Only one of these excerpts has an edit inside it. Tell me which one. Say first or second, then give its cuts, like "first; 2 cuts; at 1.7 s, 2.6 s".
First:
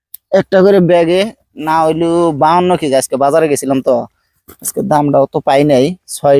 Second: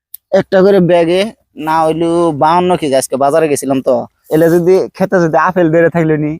second; 1 cut; at 4.2 s